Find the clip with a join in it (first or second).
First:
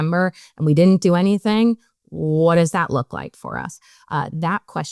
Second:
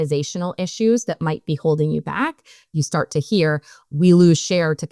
second